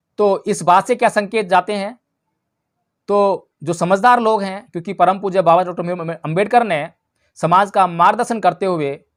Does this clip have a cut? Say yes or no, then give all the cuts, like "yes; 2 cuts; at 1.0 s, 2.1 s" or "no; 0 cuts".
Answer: no; 0 cuts